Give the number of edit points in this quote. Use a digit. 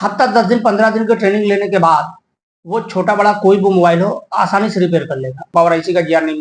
1